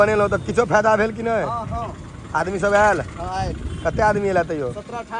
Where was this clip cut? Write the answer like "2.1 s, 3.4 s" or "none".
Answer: none